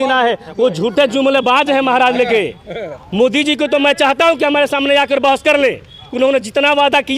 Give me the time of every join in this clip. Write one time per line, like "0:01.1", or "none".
none